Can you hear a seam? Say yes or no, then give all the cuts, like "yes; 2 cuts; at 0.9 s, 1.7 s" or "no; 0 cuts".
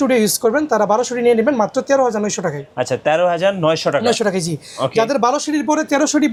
no; 0 cuts